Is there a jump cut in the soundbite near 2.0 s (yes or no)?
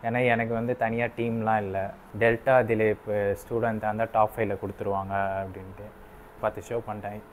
yes